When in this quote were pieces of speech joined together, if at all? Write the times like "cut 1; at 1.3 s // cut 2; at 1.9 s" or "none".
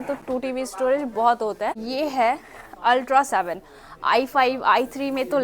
cut 1; at 1.8 s